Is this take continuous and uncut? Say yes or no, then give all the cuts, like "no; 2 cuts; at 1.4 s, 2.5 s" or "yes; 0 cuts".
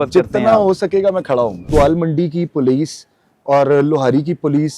no; 1 cut; at 1.7 s